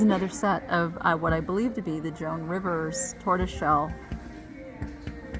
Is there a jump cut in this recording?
no; 0 cuts

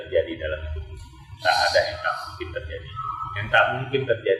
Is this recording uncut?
yes; 0 cuts

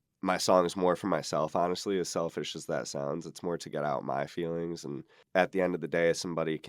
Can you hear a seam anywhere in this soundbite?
yes; 1 cut; at 5.1 s

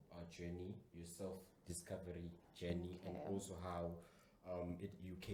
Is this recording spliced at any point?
no; 0 cuts

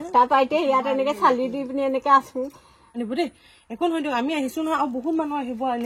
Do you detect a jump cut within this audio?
no; 0 cuts

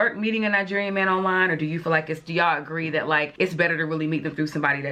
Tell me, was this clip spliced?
no; 0 cuts

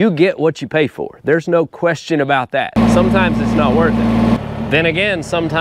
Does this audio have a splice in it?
yes; 2 cuts; at 2.8 s, 4.4 s

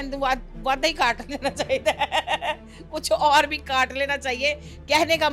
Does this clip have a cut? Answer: no; 0 cuts

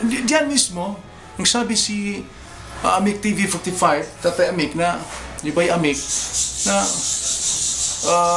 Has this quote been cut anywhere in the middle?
no; 0 cuts

